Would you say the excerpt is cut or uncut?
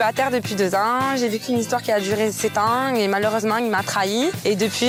uncut